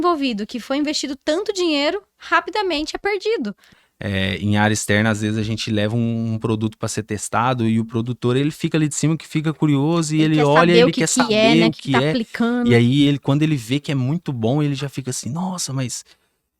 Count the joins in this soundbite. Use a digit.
1